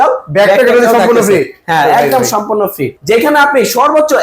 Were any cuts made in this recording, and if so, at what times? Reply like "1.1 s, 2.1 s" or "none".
2.9 s